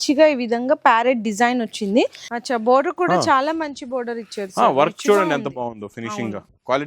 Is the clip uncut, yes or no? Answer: no